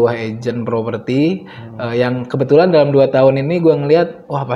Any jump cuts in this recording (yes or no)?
no